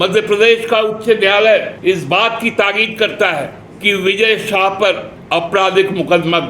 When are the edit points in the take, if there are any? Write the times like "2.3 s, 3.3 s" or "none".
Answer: 1.7 s, 3.6 s, 5.1 s